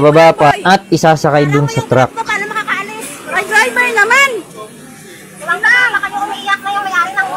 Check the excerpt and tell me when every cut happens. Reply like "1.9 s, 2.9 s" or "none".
3.3 s